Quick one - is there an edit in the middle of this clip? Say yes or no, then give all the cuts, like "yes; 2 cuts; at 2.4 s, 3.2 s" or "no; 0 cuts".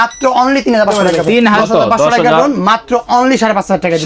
yes; 1 cut; at 1.6 s